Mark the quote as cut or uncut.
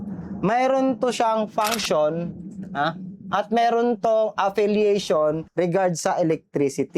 uncut